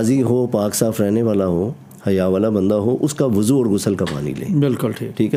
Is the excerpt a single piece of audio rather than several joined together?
yes; 0 cuts

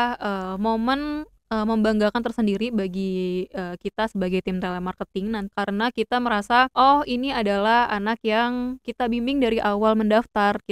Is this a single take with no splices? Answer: no; 3 cuts; at 5.5 s, 6.7 s, 8.9 s

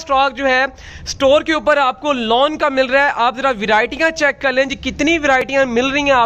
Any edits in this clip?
no; 0 cuts

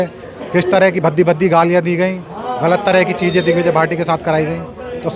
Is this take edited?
no; 0 cuts

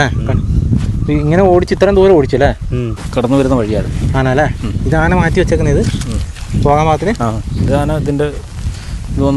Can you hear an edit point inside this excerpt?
yes; 1 cut; at 3.0 s

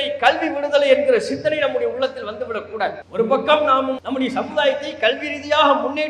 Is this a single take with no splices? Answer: no; 2 cuts; at 3.0 s, 4.0 s

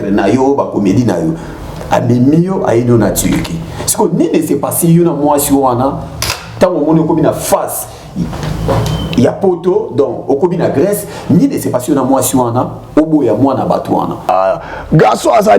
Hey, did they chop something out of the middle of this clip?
yes; 1 cut; at 14.3 s

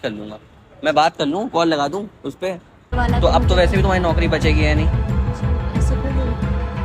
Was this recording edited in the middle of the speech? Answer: yes; 1 cut; at 2.9 s

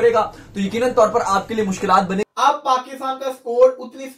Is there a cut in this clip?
yes; 1 cut; at 2.3 s

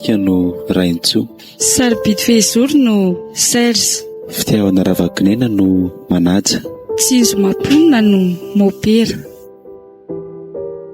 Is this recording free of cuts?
no; 1 cut; at 9.1 s

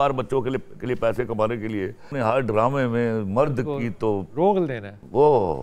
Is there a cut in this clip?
yes; 1 cut; at 2.1 s

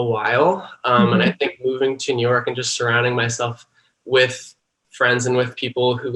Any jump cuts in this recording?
no; 0 cuts

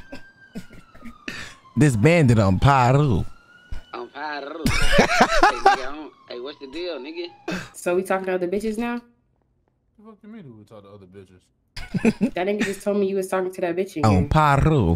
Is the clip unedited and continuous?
no; 1 cut; at 7.7 s

